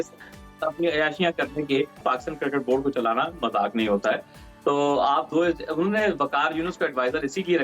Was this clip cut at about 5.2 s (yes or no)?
no